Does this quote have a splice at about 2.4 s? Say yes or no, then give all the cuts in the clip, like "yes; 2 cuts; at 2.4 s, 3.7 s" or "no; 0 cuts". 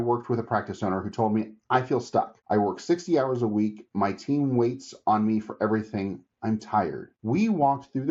yes; 2 cuts; at 2.4 s, 7.1 s